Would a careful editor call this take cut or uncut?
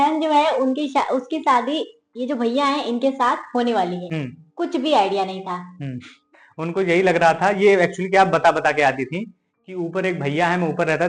uncut